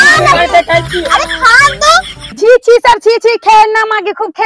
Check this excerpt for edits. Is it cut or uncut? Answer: cut